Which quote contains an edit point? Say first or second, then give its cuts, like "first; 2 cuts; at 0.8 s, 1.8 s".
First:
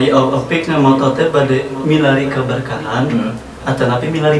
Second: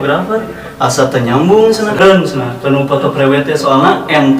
second; 1 cut; at 2.0 s